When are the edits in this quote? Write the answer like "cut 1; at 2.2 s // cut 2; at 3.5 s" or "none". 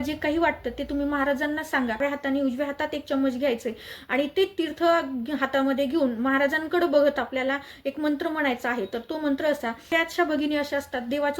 cut 1; at 2.0 s // cut 2; at 9.9 s